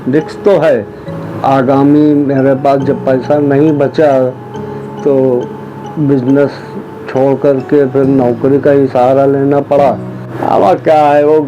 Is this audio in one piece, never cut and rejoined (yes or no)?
no